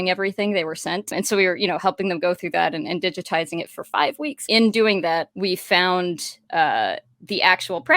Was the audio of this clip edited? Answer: yes; 3 cuts; at 1.1 s, 4.4 s, 5.3 s

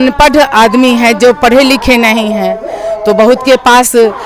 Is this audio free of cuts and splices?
yes; 0 cuts

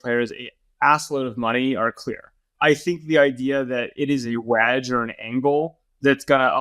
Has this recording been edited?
yes; 1 cut; at 2.4 s

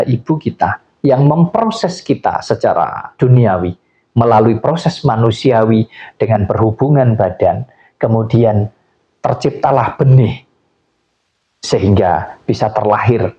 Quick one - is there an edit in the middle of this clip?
no; 0 cuts

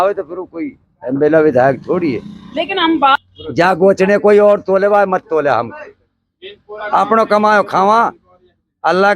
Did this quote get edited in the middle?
yes; 1 cut; at 3.2 s

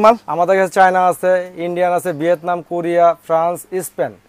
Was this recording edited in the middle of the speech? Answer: no; 0 cuts

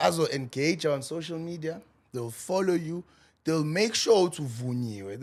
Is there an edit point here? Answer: no; 0 cuts

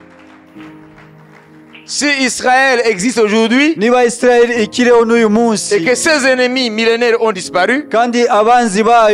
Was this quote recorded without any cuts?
yes; 0 cuts

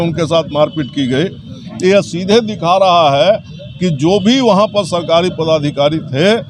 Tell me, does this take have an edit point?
no; 0 cuts

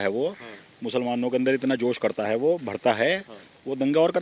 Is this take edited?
no; 0 cuts

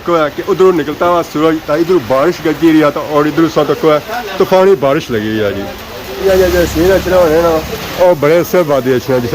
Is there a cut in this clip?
yes; 2 cuts; at 6.2 s, 7.8 s

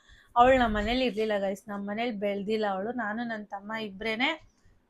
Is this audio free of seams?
yes; 0 cuts

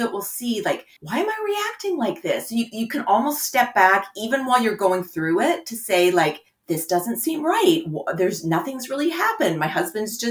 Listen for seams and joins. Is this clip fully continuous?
yes; 0 cuts

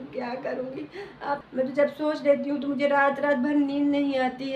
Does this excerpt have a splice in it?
yes; 1 cut; at 1.4 s

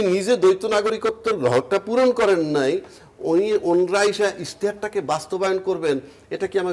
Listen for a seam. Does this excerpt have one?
no; 0 cuts

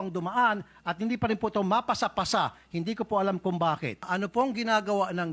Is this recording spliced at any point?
yes; 1 cut; at 4.1 s

